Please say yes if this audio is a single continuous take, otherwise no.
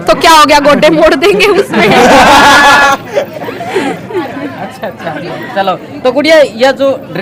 yes